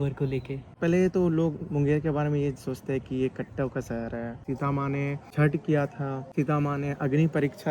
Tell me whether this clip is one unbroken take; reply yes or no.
no